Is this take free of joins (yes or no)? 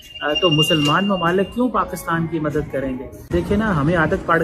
yes